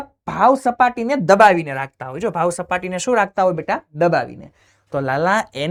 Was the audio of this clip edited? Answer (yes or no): no